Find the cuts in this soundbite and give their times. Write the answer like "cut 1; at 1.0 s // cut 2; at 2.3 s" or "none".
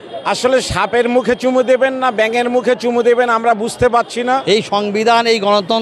cut 1; at 4.2 s